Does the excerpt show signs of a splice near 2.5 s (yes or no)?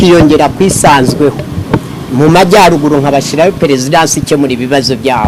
no